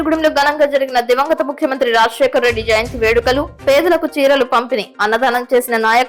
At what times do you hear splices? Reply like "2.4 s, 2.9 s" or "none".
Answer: none